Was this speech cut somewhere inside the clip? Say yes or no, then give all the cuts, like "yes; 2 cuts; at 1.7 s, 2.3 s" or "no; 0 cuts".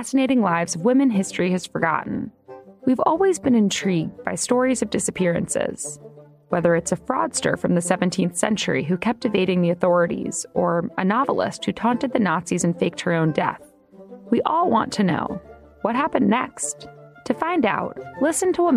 yes; 1 cut; at 2.0 s